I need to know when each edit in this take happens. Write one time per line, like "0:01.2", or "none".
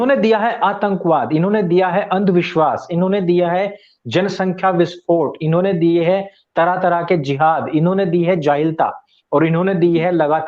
none